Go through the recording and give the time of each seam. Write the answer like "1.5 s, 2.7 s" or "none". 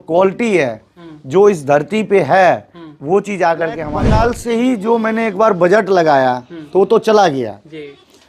3.9 s